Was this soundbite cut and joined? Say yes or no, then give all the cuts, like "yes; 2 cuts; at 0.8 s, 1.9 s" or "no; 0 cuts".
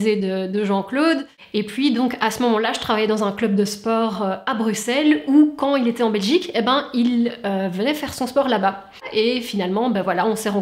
yes; 2 cuts; at 1.4 s, 9.0 s